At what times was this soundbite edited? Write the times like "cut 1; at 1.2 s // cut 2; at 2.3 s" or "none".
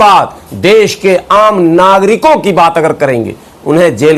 none

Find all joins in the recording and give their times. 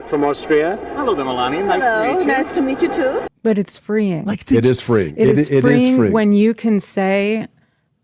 cut 1; at 3.3 s

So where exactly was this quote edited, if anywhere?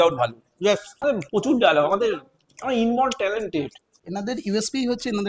cut 1; at 1.4 s // cut 2; at 4.0 s

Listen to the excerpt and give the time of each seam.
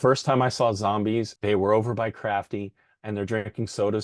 cut 1; at 1.3 s

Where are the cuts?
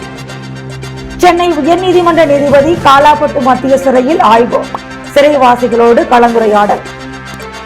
none

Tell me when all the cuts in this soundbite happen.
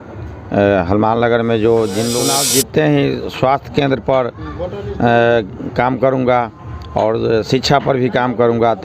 cut 1; at 2.2 s

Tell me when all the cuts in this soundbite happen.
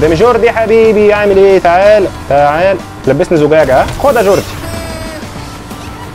cut 1; at 2.9 s // cut 2; at 3.9 s

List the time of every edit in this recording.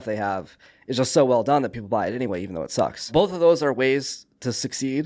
cut 1; at 3.0 s

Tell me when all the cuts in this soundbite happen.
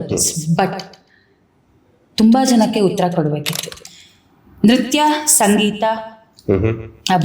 cut 1; at 3.9 s

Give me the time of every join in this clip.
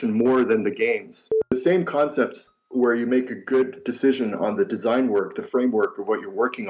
cut 1; at 1.5 s

